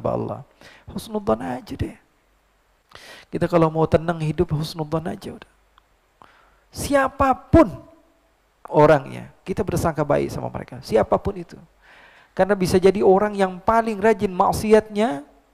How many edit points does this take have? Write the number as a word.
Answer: zero